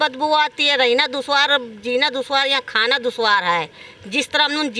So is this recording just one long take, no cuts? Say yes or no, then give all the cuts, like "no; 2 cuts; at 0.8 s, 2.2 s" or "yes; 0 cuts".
yes; 0 cuts